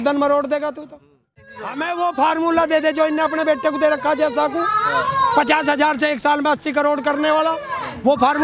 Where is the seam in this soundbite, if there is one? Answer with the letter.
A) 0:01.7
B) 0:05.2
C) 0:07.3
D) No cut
A